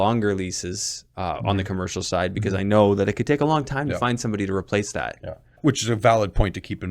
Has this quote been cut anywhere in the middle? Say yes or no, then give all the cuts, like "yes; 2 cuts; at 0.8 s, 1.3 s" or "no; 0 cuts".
yes; 1 cut; at 5.6 s